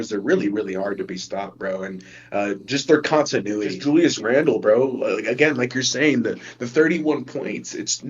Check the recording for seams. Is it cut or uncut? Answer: cut